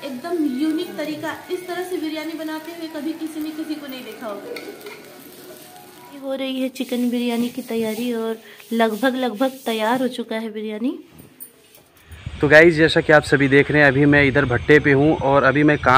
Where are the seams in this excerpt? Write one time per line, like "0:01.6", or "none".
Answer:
0:06.3
0:11.9